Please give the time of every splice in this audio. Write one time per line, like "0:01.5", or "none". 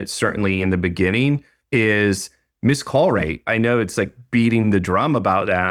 none